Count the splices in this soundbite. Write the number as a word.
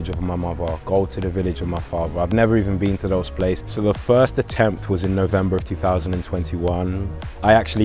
one